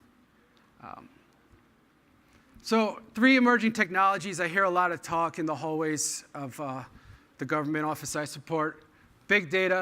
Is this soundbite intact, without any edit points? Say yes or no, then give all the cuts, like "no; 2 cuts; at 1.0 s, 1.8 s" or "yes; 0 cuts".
no; 1 cut; at 6.9 s